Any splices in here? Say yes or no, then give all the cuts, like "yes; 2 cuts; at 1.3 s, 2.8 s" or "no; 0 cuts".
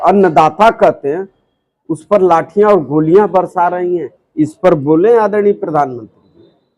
no; 0 cuts